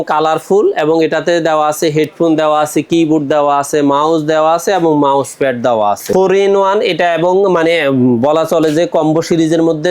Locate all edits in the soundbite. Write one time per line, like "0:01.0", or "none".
0:06.0